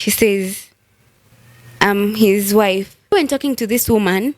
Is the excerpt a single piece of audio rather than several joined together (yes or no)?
no